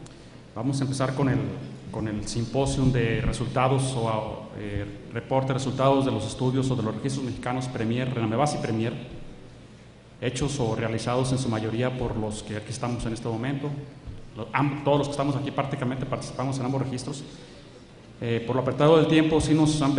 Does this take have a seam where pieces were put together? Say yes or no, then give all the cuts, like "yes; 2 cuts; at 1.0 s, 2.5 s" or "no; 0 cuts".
yes; 1 cut; at 11.1 s